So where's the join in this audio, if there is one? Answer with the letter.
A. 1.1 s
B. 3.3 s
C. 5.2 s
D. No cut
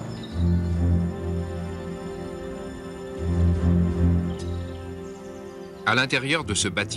B